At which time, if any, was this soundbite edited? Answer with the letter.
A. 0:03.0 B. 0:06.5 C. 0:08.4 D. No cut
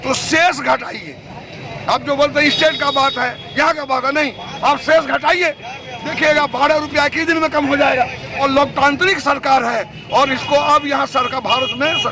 C